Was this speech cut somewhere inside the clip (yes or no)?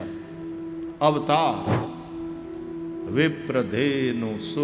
no